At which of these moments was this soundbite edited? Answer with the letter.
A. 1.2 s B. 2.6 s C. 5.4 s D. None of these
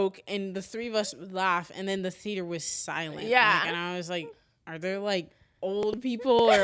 D